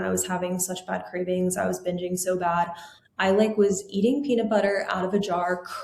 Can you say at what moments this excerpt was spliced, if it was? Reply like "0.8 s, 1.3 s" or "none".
none